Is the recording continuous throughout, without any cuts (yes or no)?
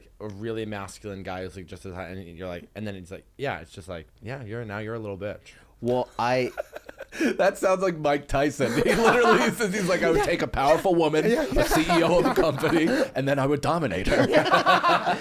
yes